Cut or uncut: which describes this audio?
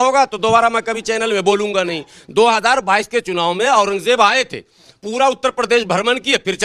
uncut